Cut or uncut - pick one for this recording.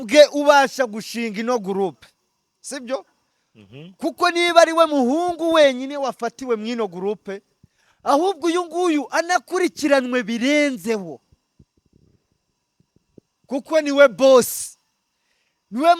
uncut